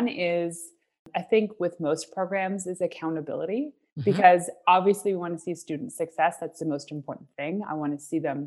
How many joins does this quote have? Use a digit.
1